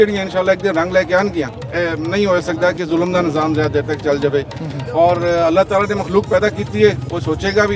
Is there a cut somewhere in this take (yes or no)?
no